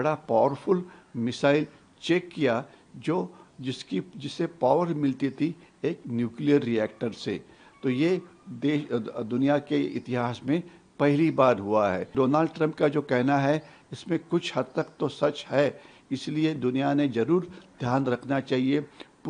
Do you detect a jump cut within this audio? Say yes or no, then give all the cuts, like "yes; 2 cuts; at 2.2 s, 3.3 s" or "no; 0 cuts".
yes; 1 cut; at 12.0 s